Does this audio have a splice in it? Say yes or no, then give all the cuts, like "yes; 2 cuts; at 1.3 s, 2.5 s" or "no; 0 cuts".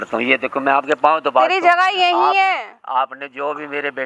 no; 0 cuts